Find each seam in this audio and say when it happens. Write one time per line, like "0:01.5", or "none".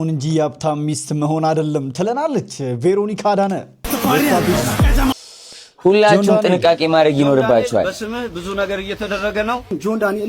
0:05.1

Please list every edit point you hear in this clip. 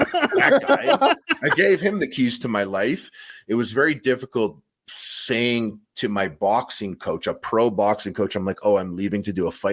0:03.3

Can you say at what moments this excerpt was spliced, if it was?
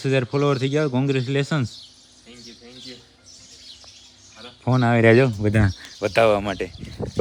none

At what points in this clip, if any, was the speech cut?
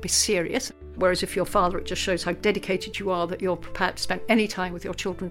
0:01.0

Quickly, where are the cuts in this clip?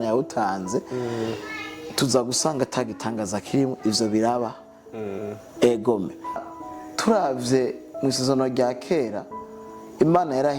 0:06.4

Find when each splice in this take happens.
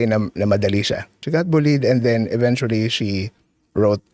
0:01.2

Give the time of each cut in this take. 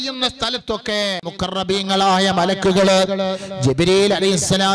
0:01.2

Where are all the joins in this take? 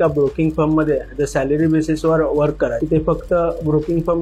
0:02.8

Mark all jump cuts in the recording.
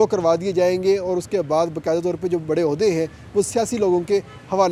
none

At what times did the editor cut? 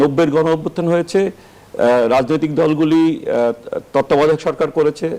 none

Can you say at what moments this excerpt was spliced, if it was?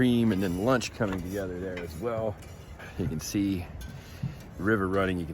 0:02.8

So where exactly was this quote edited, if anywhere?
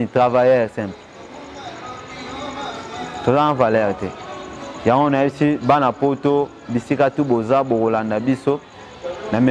none

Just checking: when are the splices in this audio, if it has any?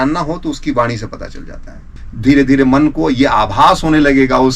0:02.0

